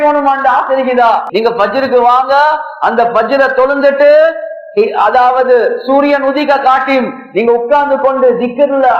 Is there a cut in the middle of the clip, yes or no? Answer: yes